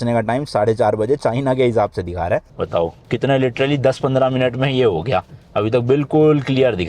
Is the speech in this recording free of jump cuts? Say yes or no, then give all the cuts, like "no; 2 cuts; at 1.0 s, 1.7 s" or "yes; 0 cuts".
no; 1 cut; at 2.5 s